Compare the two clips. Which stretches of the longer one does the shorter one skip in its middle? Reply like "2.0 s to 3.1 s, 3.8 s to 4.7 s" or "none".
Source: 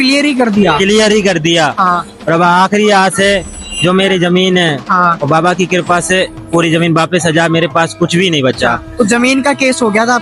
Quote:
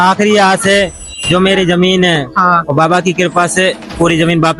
none